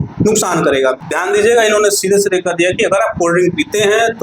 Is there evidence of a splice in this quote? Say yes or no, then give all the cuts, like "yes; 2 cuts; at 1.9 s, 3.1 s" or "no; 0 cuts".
yes; 1 cut; at 1.1 s